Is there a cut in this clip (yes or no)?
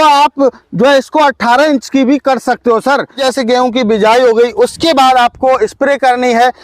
yes